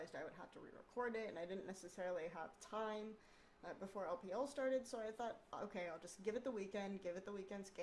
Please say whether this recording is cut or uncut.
uncut